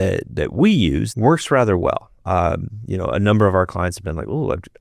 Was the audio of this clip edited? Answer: yes; 1 cut; at 1.1 s

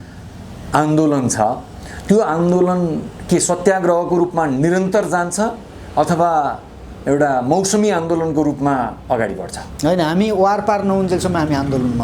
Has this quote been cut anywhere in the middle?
no; 0 cuts

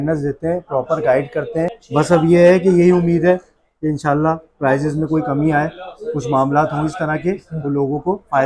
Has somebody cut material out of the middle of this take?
yes; 1 cut; at 1.8 s

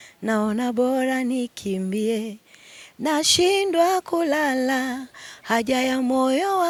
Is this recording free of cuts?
yes; 0 cuts

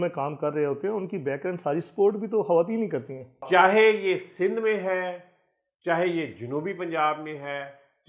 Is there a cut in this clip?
yes; 1 cut; at 3.5 s

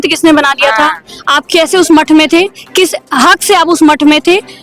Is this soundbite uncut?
yes; 0 cuts

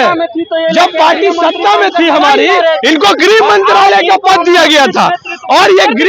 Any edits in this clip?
no; 0 cuts

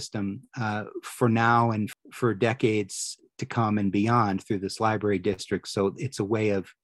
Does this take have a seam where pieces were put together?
yes; 1 cut; at 1.9 s

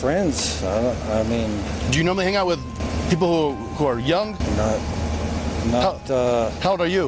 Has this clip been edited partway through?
no; 0 cuts

